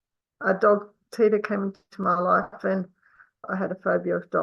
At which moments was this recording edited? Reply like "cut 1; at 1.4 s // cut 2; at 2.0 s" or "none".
cut 1; at 3.5 s